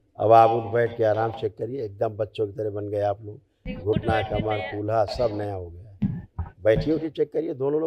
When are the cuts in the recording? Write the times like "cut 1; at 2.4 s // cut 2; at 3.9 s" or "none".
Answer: none